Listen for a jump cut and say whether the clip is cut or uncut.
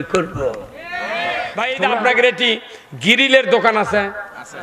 cut